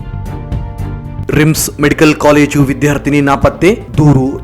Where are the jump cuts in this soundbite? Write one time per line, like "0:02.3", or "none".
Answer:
0:01.2